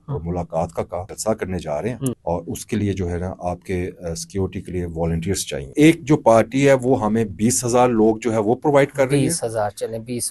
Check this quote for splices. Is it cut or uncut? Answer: cut